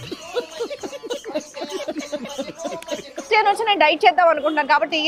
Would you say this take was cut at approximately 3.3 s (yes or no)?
yes